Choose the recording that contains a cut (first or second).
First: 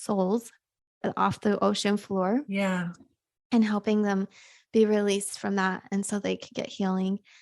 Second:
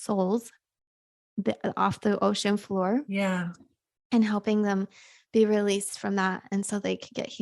first